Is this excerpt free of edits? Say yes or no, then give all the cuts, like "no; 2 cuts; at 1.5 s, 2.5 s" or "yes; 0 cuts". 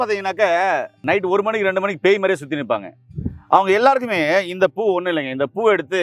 no; 1 cut; at 1.0 s